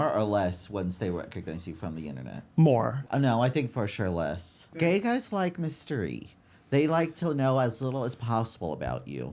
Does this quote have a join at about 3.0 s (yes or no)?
yes